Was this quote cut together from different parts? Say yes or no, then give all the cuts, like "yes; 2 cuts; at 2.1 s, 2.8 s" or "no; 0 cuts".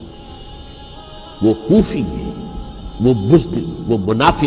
no; 0 cuts